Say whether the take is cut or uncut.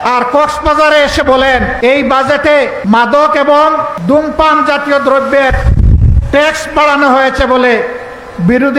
cut